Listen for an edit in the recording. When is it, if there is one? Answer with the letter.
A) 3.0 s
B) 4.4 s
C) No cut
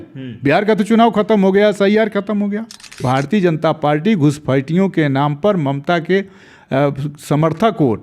A